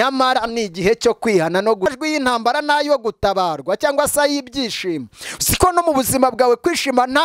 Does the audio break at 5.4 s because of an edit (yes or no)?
no